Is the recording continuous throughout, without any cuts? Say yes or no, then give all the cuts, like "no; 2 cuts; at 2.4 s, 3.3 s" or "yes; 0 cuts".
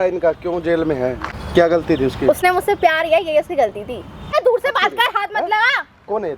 no; 2 cuts; at 1.3 s, 4.3 s